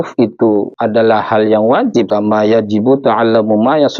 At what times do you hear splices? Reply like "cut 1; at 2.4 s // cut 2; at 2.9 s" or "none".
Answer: cut 1; at 2.1 s